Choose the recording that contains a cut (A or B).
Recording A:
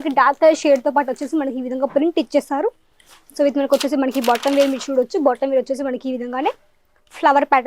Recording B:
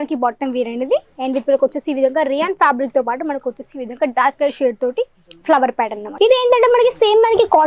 B